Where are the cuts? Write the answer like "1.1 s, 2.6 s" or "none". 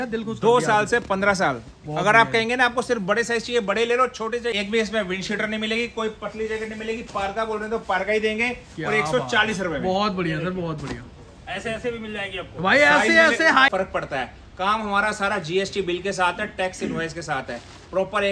4.5 s, 13.7 s